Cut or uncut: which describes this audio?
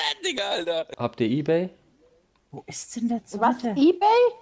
cut